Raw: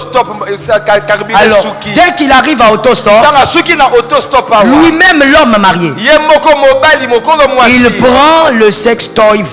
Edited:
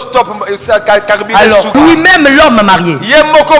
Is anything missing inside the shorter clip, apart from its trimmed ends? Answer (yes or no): yes